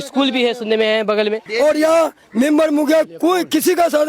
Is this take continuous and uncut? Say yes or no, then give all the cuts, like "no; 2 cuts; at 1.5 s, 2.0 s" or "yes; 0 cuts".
no; 1 cut; at 1.4 s